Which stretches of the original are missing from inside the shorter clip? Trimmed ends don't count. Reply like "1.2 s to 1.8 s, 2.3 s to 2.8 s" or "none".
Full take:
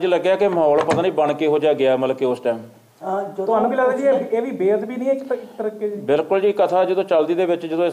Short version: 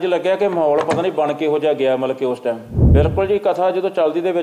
2.8 s to 6.0 s